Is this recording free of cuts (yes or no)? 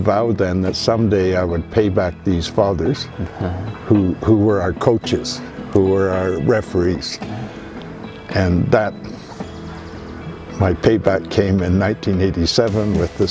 yes